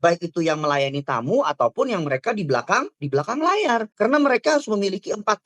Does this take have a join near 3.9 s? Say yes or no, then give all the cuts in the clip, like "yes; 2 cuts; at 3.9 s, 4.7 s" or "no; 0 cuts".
yes; 1 cut; at 3.9 s